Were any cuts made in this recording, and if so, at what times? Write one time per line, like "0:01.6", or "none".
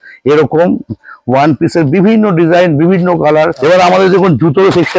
0:03.5